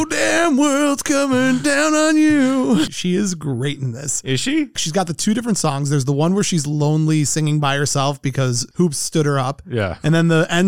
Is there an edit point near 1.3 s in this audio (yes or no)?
no